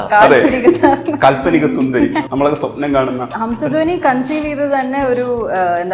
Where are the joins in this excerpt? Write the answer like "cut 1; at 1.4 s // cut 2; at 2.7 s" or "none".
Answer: cut 1; at 2.3 s // cut 2; at 3.3 s